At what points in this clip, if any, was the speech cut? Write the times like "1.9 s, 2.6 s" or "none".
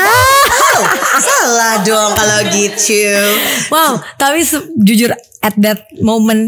none